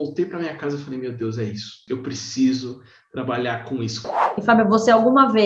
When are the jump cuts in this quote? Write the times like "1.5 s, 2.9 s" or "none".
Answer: 1.8 s, 4.2 s